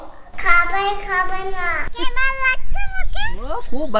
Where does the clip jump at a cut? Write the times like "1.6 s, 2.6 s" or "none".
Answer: 1.9 s